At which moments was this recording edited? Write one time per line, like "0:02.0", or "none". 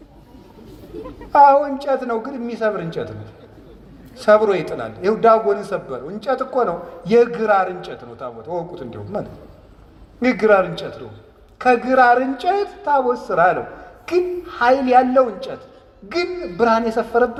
none